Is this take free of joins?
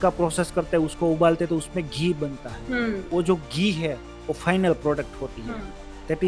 no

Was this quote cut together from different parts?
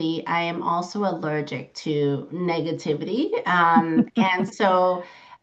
no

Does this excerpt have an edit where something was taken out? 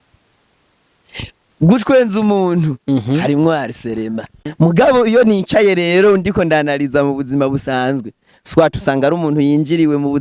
yes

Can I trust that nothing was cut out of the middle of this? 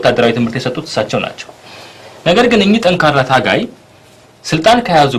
yes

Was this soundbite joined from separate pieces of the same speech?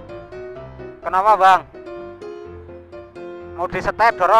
yes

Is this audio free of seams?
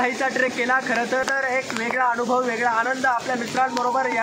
no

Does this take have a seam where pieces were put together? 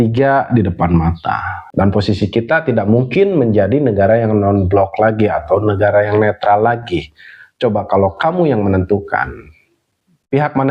yes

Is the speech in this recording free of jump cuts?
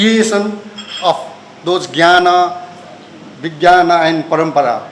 yes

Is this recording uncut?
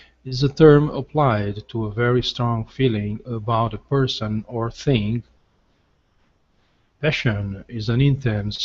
no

